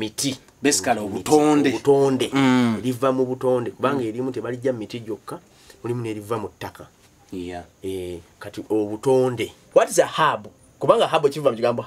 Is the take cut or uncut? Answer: cut